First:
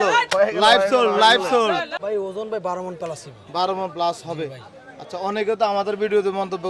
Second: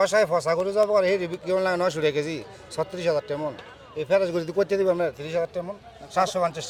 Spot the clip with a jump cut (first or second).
first